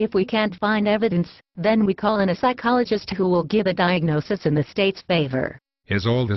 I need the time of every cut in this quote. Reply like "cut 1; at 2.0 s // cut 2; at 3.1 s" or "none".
cut 1; at 2.0 s